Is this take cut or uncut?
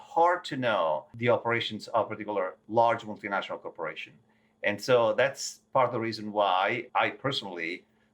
cut